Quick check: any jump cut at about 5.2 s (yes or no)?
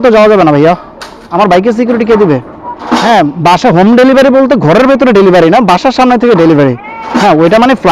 no